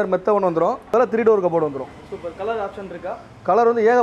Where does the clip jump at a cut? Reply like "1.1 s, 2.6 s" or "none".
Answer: 0.9 s